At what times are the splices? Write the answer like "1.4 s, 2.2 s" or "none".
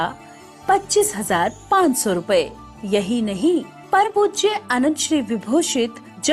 4.1 s